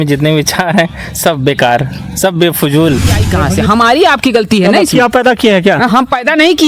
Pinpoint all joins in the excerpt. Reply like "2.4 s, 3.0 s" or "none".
3.5 s